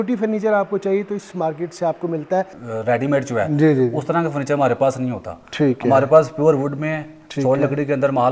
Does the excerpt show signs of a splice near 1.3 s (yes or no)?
no